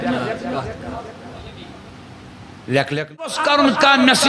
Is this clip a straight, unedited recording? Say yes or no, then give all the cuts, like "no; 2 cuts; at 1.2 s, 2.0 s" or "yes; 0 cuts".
no; 1 cut; at 3.4 s